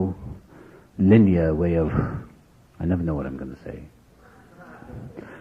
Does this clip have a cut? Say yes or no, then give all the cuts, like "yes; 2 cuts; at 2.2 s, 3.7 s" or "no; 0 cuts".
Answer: no; 0 cuts